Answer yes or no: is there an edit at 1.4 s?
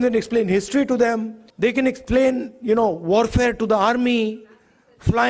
yes